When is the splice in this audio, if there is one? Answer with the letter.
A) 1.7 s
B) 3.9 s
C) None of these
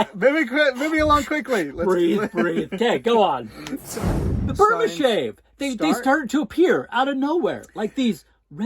B